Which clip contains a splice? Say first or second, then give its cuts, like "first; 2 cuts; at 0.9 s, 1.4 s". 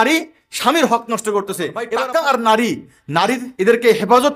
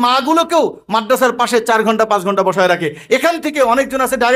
first; 1 cut; at 1.9 s